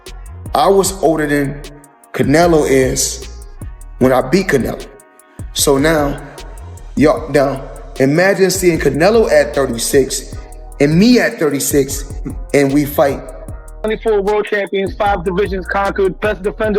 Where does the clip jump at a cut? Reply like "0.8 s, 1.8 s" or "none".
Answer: 13.8 s